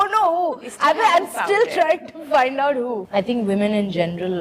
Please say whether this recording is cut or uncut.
cut